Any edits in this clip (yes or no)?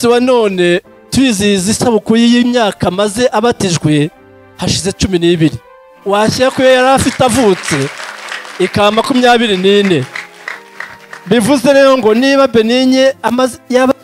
no